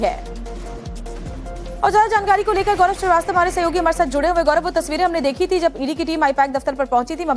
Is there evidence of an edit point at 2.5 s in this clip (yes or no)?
yes